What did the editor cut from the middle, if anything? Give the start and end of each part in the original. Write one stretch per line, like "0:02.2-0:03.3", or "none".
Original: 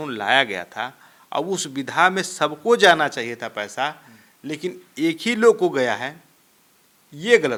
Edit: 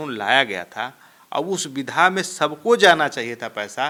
none